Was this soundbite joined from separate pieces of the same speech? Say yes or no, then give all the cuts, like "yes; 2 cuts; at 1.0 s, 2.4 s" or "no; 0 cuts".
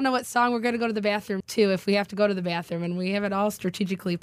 yes; 1 cut; at 1.4 s